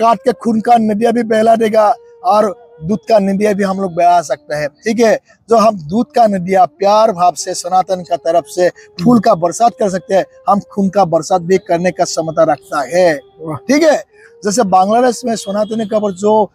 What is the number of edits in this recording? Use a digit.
0